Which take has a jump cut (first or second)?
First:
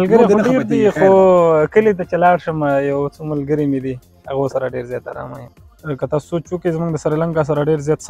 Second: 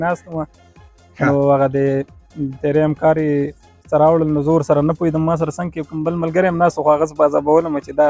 first